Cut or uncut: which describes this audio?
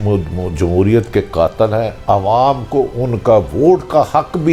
uncut